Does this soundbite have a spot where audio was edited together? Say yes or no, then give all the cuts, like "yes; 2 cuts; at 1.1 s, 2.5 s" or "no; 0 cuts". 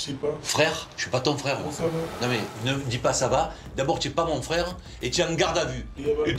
no; 0 cuts